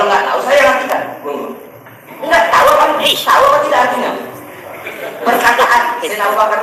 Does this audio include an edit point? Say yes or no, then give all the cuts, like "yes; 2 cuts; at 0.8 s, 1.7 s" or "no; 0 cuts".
no; 0 cuts